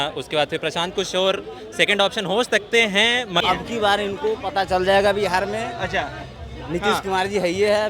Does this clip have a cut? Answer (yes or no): yes